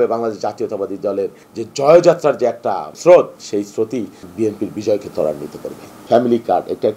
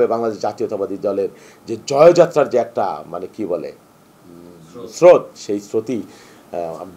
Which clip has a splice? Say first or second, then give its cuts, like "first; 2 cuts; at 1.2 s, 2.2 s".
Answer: first; 4 cuts; at 1.5 s, 2.9 s, 4.2 s, 6.0 s